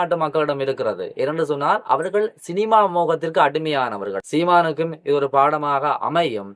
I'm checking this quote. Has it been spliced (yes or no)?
yes